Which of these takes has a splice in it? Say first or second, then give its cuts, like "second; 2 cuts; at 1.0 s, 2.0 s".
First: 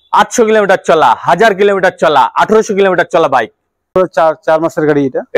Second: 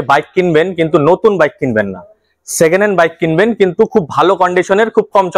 first; 1 cut; at 3.9 s